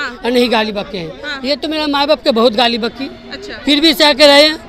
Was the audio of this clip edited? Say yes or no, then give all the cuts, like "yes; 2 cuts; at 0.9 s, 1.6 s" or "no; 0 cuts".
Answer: no; 0 cuts